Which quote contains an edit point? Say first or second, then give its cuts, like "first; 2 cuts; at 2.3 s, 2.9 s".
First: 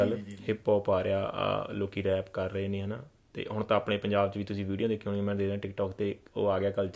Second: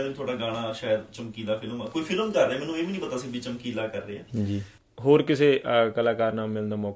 second; 1 cut; at 4.7 s